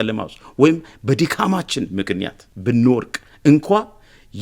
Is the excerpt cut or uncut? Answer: cut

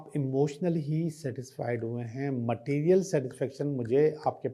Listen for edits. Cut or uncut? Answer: uncut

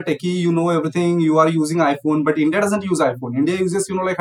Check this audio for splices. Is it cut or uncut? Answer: uncut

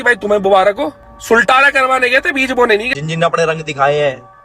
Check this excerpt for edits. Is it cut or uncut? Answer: cut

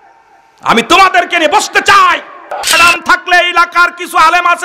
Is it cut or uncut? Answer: cut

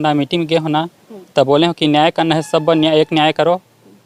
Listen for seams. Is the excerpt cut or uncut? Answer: uncut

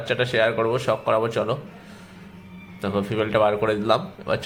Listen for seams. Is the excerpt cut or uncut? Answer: uncut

